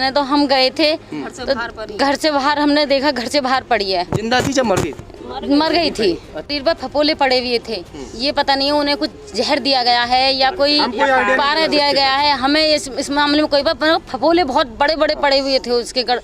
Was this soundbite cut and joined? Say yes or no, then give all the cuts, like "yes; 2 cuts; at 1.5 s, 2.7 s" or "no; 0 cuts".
yes; 1 cut; at 6.5 s